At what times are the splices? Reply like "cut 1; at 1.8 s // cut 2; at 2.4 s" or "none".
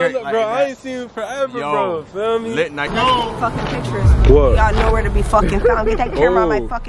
cut 1; at 2.9 s